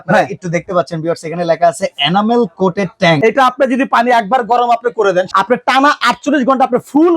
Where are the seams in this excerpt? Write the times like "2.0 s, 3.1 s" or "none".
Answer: 3.2 s, 5.3 s